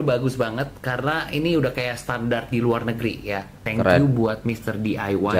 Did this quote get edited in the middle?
yes; 1 cut; at 3.7 s

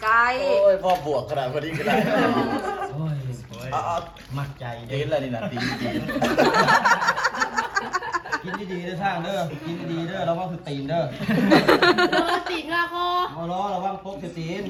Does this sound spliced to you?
no; 0 cuts

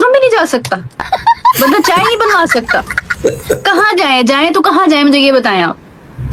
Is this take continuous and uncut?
yes; 0 cuts

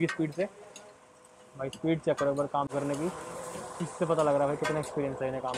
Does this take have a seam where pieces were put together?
no; 0 cuts

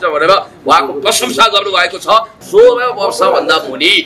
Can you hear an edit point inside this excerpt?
yes; 1 cut; at 2.4 s

